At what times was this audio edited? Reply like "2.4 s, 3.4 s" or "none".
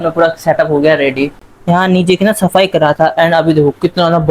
1.5 s